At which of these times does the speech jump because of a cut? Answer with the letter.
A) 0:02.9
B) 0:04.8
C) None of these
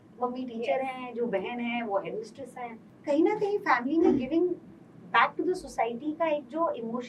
A